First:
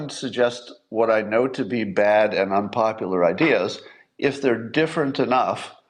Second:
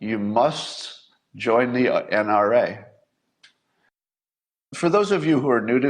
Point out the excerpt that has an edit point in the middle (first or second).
second